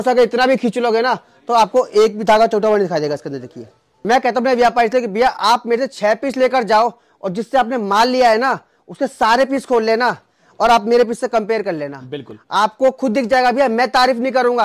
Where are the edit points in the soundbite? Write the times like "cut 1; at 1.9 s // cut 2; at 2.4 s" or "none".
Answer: cut 1; at 3.9 s